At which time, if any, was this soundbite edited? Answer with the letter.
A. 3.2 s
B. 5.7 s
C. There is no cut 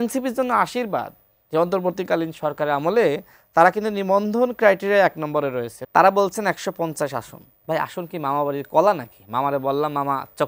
B